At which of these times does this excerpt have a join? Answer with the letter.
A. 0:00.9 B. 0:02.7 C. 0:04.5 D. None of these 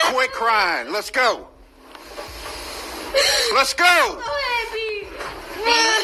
D